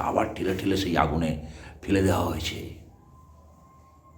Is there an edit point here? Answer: no; 0 cuts

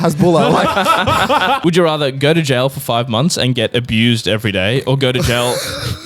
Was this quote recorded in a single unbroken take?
no; 1 cut; at 1.6 s

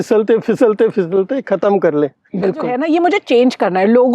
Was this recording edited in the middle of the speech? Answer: yes; 1 cut; at 2.8 s

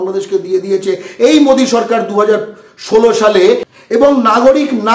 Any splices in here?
yes; 1 cut; at 4.0 s

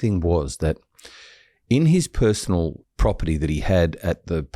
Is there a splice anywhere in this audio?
yes; 1 cut; at 2.8 s

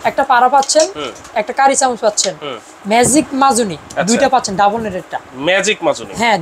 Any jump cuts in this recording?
no; 0 cuts

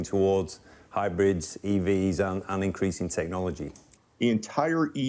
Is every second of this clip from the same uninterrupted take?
no; 1 cut; at 3.9 s

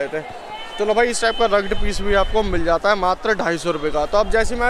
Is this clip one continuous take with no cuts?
yes; 0 cuts

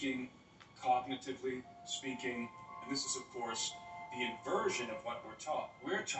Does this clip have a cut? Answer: yes; 1 cut; at 2.8 s

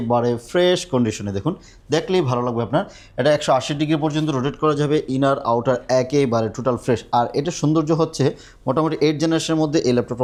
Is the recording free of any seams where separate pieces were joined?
yes; 0 cuts

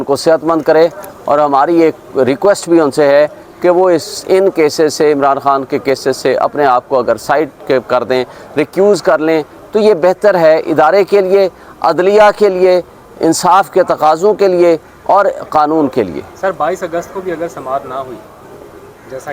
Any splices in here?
no; 0 cuts

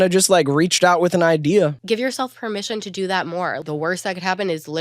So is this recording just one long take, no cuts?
no; 2 cuts; at 1.8 s, 3.6 s

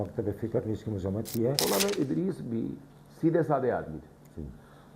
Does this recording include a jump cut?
yes; 1 cut; at 1.6 s

